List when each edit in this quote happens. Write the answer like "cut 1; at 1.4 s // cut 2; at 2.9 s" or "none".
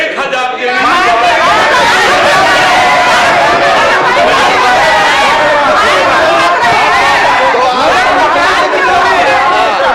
none